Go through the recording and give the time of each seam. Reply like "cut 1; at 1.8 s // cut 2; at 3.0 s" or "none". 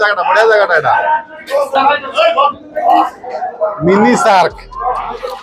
cut 1; at 1.8 s